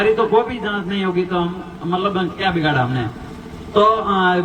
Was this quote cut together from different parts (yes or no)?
no